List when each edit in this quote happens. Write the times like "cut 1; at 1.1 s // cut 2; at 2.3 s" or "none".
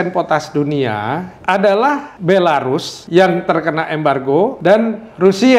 cut 1; at 1.3 s // cut 2; at 2.1 s // cut 3; at 2.9 s // cut 4; at 4.6 s